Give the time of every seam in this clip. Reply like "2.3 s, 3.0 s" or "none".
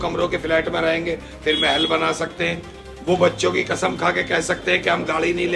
none